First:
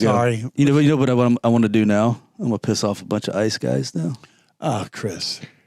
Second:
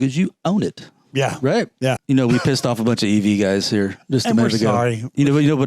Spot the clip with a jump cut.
second; 1 cut; at 2.0 s

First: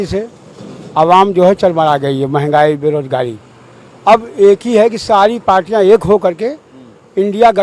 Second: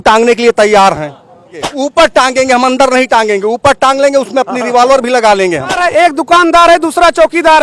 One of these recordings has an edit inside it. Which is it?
second; 2 cuts; at 1.7 s, 5.8 s

